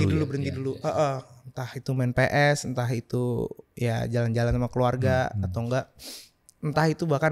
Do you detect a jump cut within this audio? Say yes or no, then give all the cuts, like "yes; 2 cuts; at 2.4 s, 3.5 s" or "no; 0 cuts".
no; 0 cuts